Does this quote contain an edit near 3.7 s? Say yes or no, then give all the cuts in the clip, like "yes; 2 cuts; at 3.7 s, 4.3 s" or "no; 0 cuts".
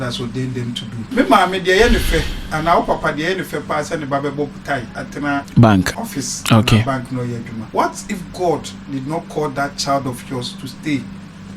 no; 4 cuts; at 0.9 s, 5.5 s, 6.0 s, 7.6 s